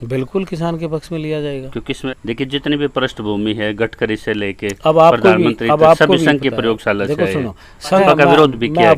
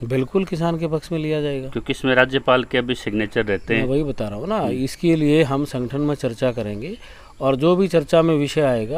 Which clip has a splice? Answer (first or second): first